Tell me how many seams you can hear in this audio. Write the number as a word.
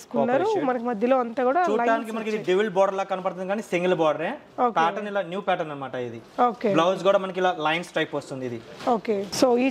zero